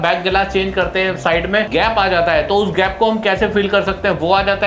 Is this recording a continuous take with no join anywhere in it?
no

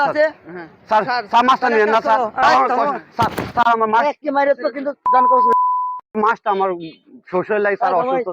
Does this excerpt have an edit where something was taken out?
yes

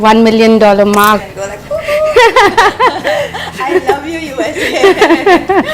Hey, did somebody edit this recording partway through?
yes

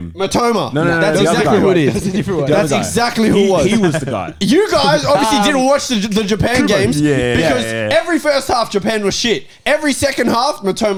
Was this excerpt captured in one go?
yes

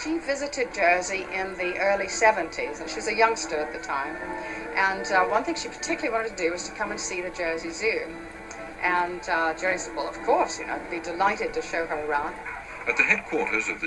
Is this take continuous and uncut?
yes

